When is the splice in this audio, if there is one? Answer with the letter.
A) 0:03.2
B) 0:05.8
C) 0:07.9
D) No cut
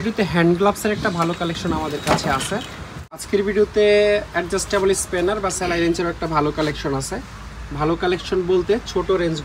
A